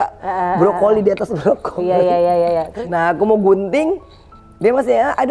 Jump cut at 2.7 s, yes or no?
yes